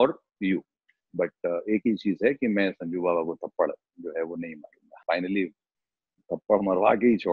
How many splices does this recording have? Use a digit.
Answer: 2